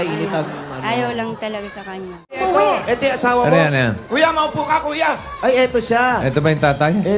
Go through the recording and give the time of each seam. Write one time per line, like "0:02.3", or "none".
0:02.4